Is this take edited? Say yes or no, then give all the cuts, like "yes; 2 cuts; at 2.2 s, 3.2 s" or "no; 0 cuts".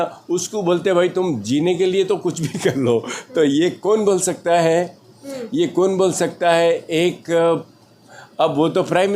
no; 0 cuts